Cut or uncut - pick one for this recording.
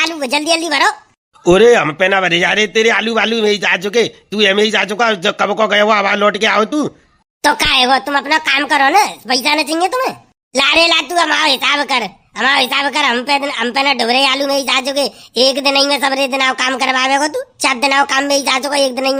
uncut